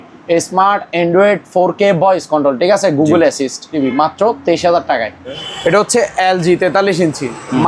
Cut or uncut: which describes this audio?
cut